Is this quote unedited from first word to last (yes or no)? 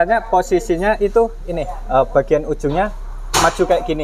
yes